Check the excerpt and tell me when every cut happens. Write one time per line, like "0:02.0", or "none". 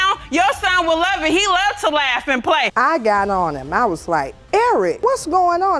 0:02.7